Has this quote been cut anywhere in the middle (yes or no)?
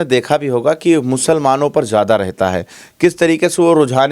no